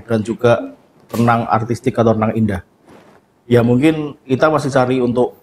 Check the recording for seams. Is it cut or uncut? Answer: uncut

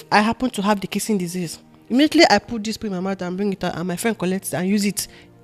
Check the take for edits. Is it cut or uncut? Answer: uncut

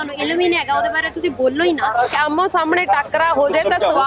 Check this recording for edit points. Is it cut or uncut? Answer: cut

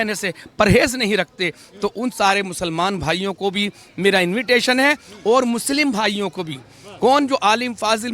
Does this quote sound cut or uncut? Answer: uncut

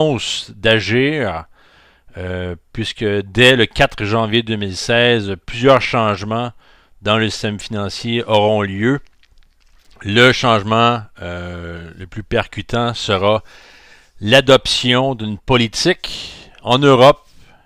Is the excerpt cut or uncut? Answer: uncut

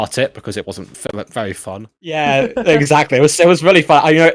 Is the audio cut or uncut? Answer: cut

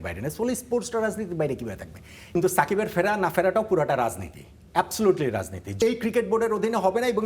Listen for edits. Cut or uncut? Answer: cut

